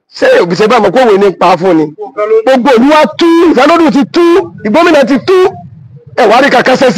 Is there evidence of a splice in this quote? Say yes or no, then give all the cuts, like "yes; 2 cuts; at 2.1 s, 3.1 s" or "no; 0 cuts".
yes; 1 cut; at 2.4 s